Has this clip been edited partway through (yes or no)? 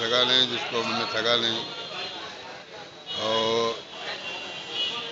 no